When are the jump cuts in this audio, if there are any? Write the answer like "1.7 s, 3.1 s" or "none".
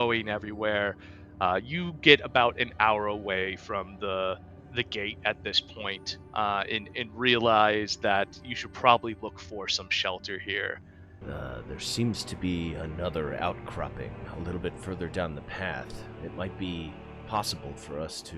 11.2 s